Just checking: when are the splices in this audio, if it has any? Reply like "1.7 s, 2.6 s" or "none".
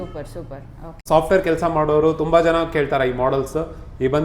1.0 s

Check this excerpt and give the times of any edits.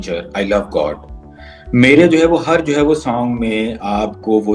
none

